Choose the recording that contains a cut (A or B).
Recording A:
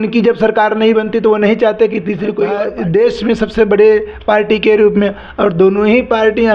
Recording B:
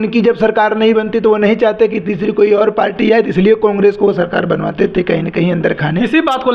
A